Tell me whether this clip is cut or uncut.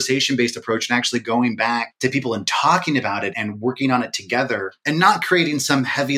cut